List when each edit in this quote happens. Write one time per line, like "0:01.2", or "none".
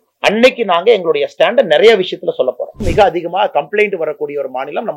0:02.9